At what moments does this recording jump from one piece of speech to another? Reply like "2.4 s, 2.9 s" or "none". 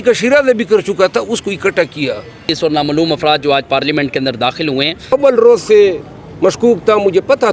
2.5 s, 4.9 s